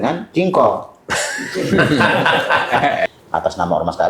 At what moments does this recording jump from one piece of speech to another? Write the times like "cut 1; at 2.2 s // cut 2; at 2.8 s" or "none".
cut 1; at 3.1 s